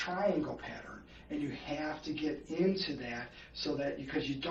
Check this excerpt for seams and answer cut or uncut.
uncut